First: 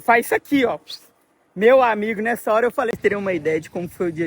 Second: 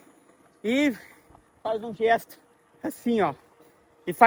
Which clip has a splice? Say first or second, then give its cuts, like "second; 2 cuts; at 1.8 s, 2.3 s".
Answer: first; 1 cut; at 3.0 s